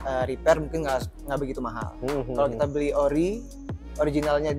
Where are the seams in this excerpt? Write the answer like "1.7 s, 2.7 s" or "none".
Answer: none